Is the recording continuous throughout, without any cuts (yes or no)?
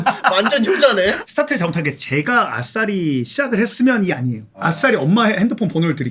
no